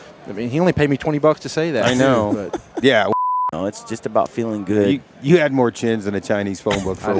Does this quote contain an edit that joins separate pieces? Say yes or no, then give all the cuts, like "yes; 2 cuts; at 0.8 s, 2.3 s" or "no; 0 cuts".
yes; 1 cut; at 3.1 s